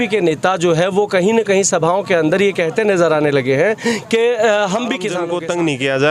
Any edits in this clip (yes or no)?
yes